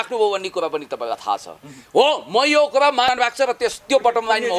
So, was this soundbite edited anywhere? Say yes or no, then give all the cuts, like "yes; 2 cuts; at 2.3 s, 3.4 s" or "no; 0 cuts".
yes; 1 cut; at 3.1 s